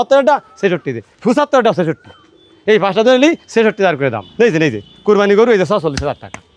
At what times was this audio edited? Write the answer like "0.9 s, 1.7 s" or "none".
4.2 s